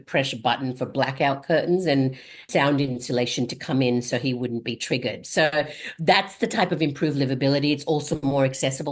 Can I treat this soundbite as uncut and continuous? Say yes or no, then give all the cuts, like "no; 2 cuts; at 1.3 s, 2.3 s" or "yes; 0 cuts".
no; 1 cut; at 2.5 s